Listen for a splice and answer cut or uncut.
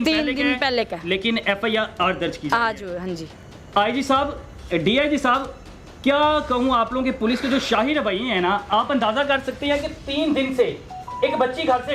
uncut